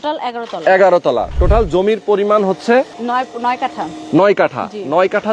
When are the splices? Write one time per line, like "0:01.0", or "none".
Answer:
0:03.0